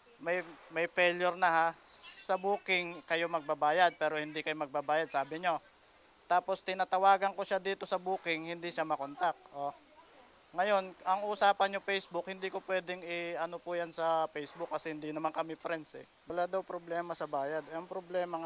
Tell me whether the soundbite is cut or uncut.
cut